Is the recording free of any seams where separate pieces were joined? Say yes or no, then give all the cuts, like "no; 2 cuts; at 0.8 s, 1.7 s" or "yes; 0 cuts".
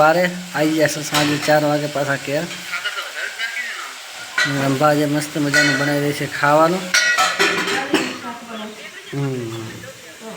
yes; 0 cuts